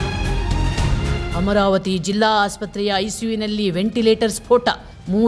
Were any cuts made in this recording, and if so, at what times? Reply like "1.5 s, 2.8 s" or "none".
1.2 s